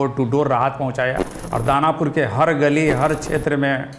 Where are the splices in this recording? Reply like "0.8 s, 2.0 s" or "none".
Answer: 1.4 s